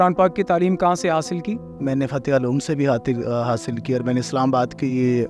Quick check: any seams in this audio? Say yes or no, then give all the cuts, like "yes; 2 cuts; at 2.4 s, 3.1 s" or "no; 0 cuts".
yes; 1 cut; at 1.7 s